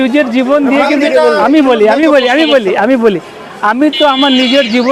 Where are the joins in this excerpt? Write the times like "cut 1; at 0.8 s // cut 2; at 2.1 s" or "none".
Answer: none